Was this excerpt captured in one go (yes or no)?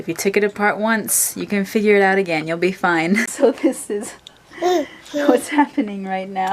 no